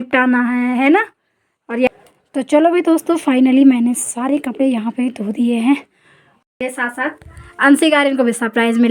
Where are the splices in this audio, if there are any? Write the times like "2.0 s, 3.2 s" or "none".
1.9 s, 6.5 s